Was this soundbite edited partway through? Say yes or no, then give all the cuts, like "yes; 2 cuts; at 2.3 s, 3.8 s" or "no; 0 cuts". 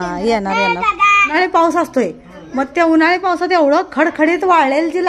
yes; 1 cut; at 1.3 s